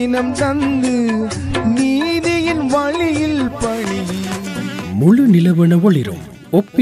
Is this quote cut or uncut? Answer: cut